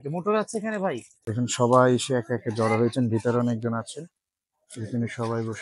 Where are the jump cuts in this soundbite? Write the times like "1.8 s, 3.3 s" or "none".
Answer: 1.1 s